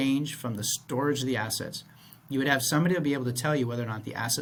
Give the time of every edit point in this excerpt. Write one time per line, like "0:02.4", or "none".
none